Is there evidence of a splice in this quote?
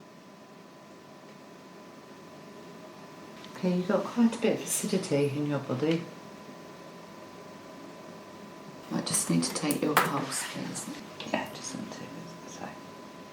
yes; 3 cuts; at 3.4 s, 8.8 s, 11.0 s

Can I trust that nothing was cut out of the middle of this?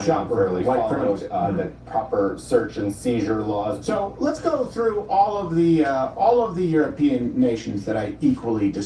no; 1 cut; at 3.8 s

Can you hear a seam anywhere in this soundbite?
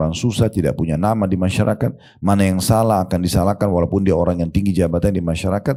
no; 0 cuts

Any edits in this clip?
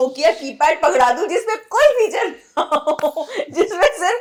no; 0 cuts

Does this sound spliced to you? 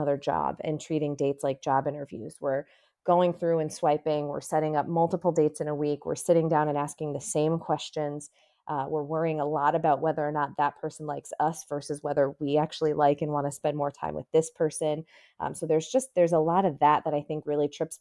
no; 0 cuts

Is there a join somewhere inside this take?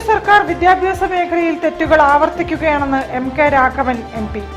no; 0 cuts

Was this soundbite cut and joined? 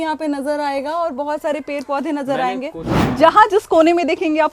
yes; 1 cut; at 3.0 s

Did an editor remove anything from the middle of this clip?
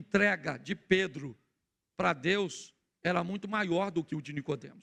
no; 0 cuts

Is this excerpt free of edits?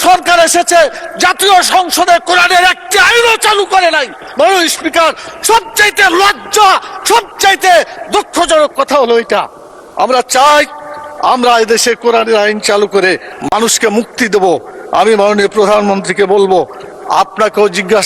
yes; 0 cuts

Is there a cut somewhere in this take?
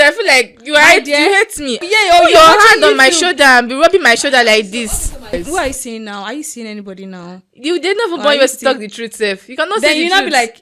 yes; 2 cuts; at 1.8 s, 5.3 s

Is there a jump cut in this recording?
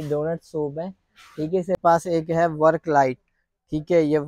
yes; 1 cut; at 1.8 s

